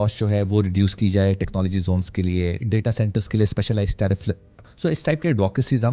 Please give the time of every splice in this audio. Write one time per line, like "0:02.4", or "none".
none